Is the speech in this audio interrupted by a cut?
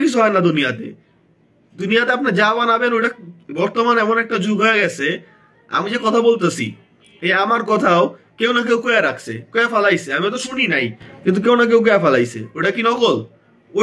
no; 0 cuts

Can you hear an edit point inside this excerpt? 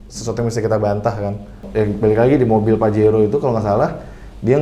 yes; 1 cut; at 1.6 s

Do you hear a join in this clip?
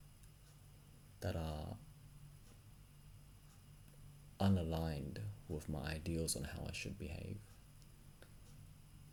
no; 0 cuts

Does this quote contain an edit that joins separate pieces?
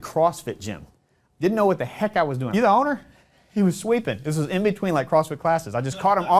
yes; 1 cut; at 2.5 s

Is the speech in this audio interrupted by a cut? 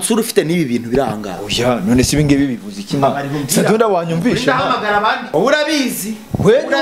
yes; 1 cut; at 5.2 s

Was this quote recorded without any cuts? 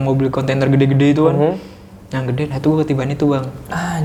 yes; 0 cuts

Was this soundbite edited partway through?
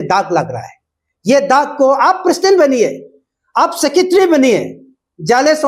no; 0 cuts

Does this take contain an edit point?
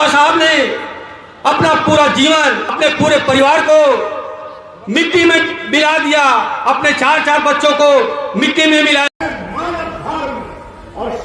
yes; 1 cut; at 9.1 s

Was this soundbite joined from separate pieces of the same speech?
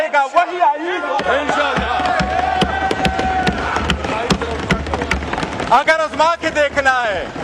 no; 0 cuts

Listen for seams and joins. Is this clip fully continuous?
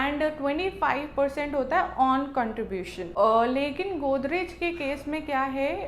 no; 1 cut; at 3.1 s

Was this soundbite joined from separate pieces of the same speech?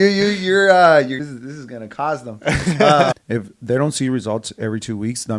yes; 2 cuts; at 1.2 s, 3.1 s

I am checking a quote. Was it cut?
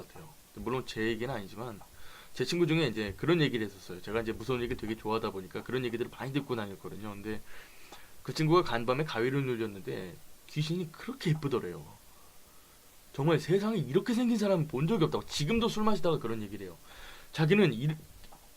yes; 1 cut; at 6.2 s

